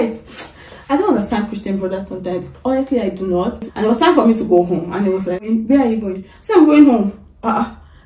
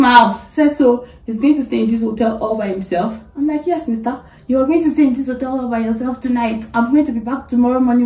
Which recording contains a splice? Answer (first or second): first